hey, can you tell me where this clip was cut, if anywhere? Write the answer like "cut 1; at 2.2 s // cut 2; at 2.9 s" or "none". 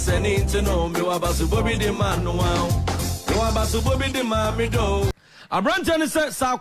cut 1; at 5.1 s